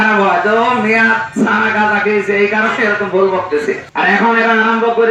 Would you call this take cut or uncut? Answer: cut